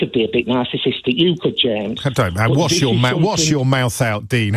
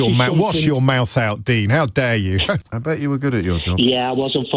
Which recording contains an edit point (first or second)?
second